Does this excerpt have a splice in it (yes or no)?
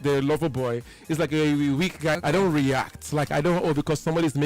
yes